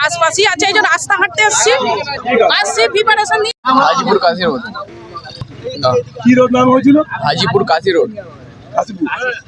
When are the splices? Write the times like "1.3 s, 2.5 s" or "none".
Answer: none